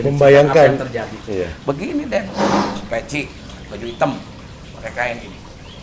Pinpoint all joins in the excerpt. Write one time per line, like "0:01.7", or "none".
none